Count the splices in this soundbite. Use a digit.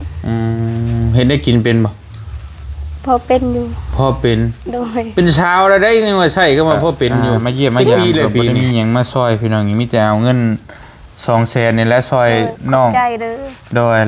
1